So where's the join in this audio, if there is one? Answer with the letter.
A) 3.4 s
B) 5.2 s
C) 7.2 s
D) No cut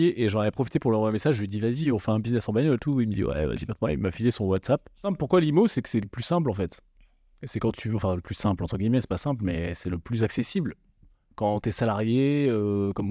B